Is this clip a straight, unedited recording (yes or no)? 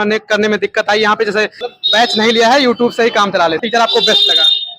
no